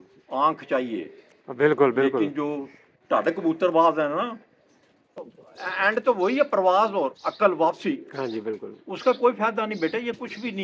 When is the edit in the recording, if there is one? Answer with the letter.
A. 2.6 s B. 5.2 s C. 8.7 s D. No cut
B